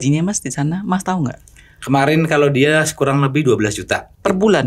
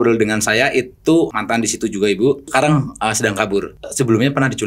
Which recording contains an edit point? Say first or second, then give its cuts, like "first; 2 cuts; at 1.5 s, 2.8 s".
second; 3 cuts; at 1.3 s, 2.5 s, 3.8 s